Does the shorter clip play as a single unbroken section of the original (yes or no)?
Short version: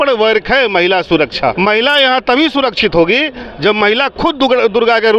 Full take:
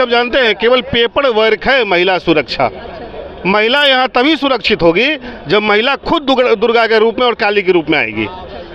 no